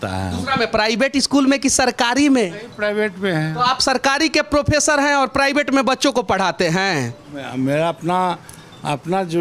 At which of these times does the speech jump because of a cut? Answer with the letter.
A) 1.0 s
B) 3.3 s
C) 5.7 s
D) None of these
D